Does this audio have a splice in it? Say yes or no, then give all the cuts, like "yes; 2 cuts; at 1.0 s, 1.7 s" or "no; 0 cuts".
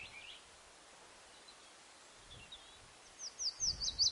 no; 0 cuts